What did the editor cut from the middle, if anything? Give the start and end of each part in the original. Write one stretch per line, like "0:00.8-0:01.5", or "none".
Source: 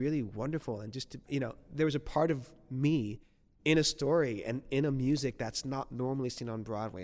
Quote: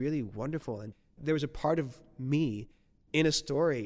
0:01.1-0:01.6